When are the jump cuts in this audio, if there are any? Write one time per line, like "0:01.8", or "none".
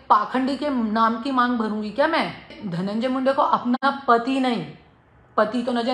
0:02.6